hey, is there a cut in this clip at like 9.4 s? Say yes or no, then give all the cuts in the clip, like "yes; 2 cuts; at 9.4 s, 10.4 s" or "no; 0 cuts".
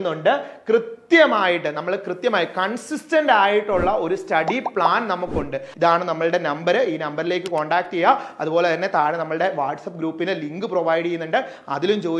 no; 1 cut; at 5.6 s